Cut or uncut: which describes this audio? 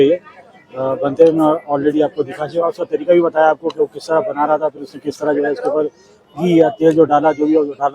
uncut